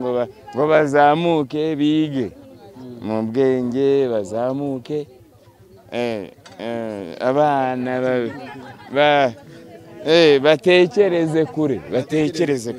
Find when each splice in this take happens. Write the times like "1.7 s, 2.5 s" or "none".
none

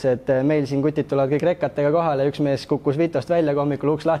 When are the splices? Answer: none

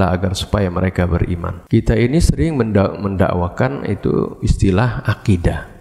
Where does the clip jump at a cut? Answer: 1.5 s

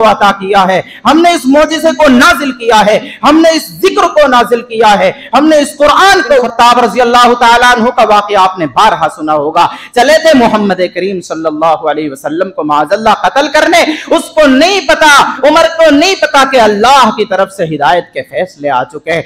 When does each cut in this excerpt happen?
6.5 s

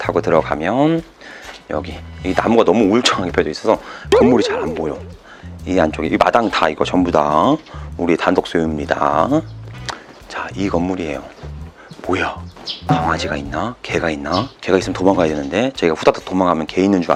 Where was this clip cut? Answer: none

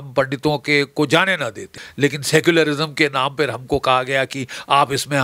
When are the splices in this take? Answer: 1.8 s

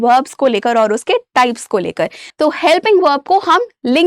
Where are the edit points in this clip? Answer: 2.2 s

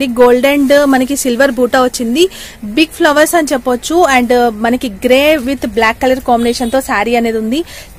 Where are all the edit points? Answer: none

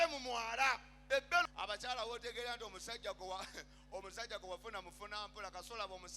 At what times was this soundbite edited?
1.4 s

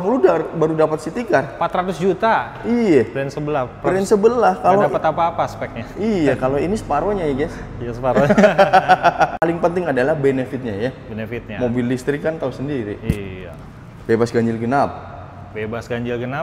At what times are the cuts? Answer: 9.4 s

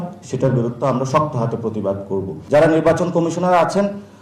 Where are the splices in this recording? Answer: 2.4 s

